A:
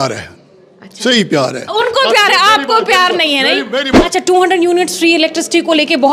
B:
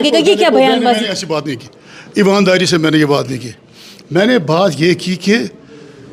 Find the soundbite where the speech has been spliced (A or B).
A